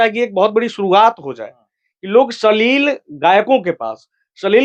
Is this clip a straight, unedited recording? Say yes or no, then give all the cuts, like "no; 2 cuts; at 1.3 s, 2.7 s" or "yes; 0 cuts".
yes; 0 cuts